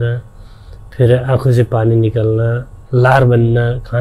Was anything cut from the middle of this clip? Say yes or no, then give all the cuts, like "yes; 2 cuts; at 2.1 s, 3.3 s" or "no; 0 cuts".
no; 0 cuts